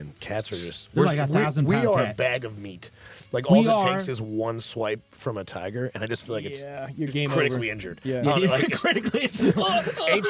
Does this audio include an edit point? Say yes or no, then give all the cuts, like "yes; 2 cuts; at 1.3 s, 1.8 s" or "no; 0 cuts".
no; 0 cuts